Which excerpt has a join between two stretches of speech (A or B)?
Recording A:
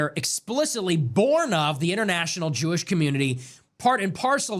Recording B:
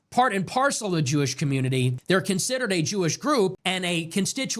B